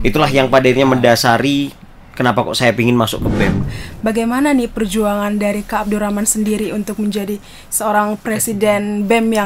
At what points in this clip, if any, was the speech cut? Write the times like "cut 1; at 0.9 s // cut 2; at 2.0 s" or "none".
cut 1; at 3.6 s